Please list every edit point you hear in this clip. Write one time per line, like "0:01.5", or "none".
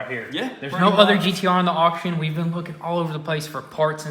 none